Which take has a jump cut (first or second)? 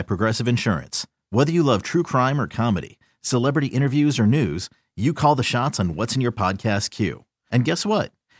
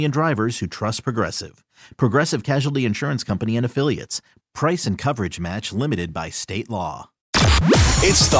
second